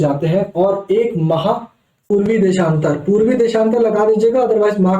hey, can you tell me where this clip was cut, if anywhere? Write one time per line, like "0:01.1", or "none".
0:02.1